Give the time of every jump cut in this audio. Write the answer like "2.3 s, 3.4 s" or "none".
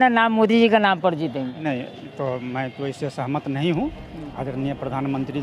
1.6 s